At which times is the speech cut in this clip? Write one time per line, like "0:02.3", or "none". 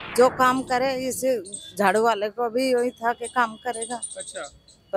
none